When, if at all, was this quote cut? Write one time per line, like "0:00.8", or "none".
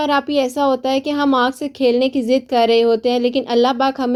none